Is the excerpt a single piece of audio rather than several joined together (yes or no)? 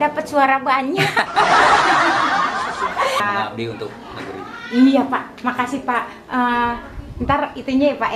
no